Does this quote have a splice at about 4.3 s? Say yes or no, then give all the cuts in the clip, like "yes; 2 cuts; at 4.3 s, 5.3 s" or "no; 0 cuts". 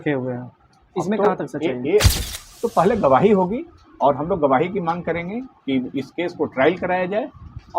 no; 1 cut; at 2.1 s